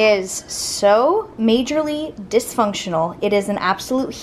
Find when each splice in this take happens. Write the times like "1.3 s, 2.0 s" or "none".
none